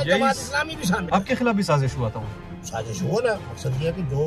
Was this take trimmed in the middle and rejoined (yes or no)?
yes